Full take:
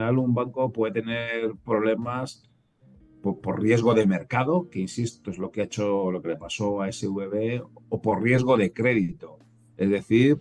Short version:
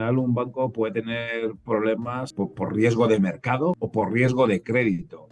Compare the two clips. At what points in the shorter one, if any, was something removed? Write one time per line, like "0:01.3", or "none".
0:02.3
0:03.8